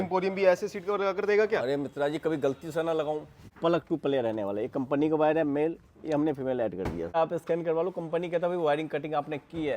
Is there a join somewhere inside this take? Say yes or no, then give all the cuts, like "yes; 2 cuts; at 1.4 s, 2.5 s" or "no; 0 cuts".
yes; 2 cuts; at 3.5 s, 7.2 s